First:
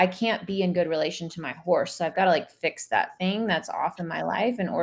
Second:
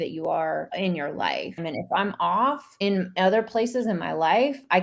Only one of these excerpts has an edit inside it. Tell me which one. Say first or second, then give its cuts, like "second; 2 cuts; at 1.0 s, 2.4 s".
second; 2 cuts; at 1.2 s, 2.7 s